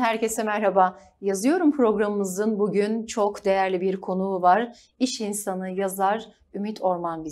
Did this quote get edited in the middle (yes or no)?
no